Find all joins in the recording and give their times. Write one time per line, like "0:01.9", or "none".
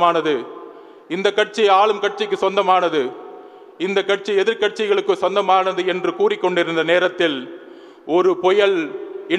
none